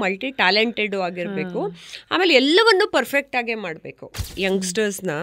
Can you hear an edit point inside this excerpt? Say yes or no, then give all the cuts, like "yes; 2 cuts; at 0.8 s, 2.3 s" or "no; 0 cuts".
yes; 1 cut; at 4.3 s